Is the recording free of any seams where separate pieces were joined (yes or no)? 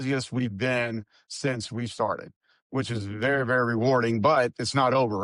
yes